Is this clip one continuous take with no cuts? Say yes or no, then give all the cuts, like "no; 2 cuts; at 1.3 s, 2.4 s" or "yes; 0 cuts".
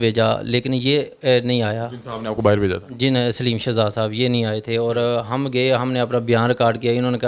yes; 0 cuts